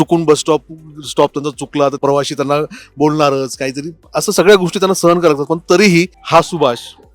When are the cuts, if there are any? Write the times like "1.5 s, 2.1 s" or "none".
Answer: 2.0 s, 6.2 s